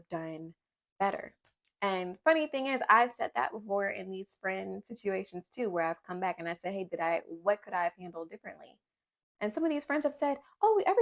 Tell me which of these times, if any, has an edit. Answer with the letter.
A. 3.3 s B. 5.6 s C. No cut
C